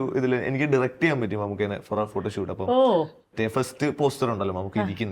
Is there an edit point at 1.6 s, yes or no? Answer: no